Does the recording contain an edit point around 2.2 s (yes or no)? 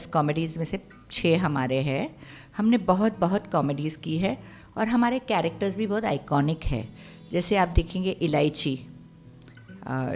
no